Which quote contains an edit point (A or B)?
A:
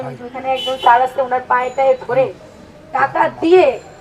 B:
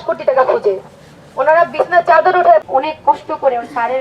B